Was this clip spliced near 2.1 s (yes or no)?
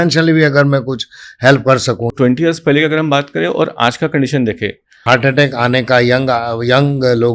yes